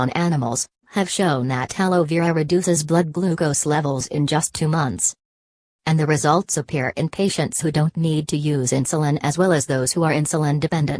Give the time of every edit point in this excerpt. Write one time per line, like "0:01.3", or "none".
0:05.6

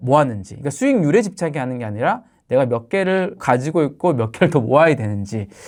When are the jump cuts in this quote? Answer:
none

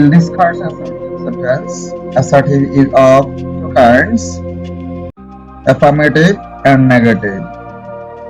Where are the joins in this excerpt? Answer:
0:04.2
0:05.5
0:07.4

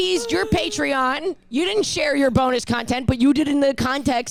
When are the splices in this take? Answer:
none

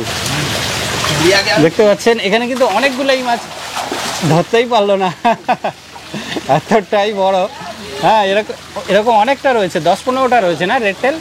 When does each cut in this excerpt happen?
none

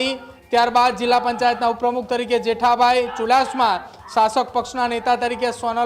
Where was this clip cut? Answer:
none

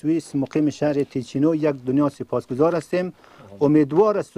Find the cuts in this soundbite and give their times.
none

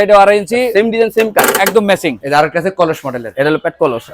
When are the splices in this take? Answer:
0:02.2

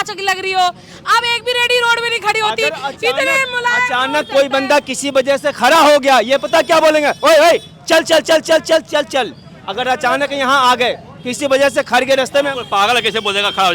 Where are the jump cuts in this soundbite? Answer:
none

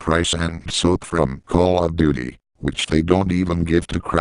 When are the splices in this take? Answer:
0:00.9

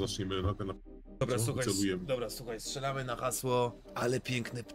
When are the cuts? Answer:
0:03.8

